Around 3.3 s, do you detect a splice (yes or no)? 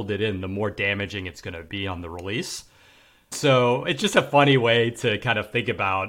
yes